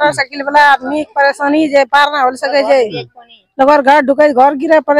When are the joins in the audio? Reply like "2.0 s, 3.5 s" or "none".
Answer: none